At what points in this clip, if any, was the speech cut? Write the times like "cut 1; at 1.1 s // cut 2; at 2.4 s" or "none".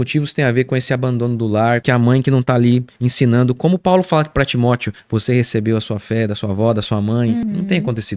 cut 1; at 1.8 s // cut 2; at 5.0 s // cut 3; at 7.4 s